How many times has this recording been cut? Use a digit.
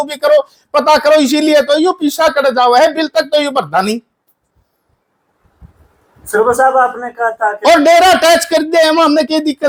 0